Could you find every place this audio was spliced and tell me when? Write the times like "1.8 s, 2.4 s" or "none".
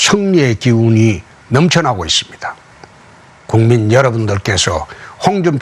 2.4 s